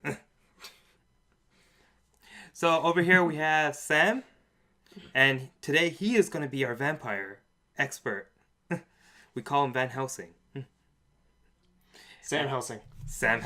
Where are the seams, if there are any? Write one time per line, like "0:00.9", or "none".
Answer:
0:05.1